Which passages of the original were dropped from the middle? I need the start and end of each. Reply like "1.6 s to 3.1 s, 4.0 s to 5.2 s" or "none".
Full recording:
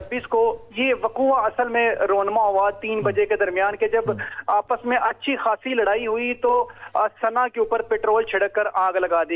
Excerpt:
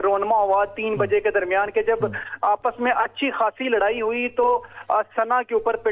none